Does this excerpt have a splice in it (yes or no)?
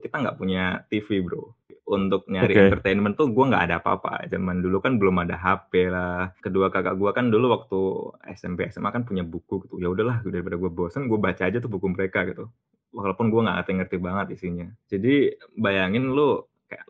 yes